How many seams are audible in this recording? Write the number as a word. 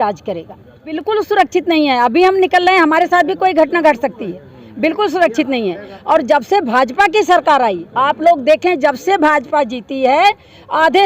one